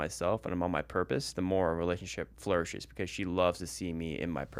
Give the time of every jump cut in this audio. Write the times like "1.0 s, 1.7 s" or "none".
2.3 s